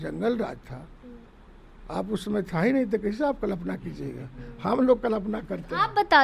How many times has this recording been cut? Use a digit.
0